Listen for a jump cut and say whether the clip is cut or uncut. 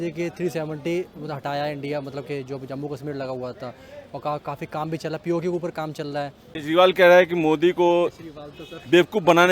cut